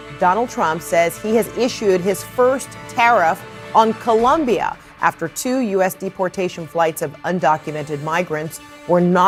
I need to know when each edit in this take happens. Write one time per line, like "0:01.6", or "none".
none